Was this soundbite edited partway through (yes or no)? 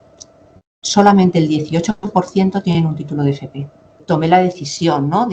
yes